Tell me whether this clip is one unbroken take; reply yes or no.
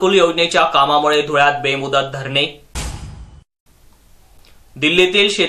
yes